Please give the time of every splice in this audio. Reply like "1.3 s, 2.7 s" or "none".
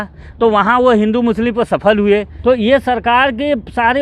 2.3 s